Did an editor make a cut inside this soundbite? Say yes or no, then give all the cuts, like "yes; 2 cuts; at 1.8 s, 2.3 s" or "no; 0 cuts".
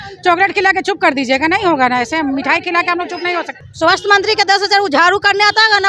yes; 1 cut; at 3.6 s